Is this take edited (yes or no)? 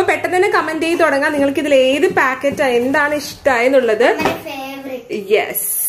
no